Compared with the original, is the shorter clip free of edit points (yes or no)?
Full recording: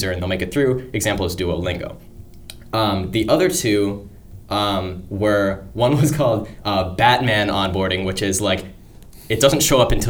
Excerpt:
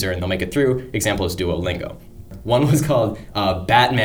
no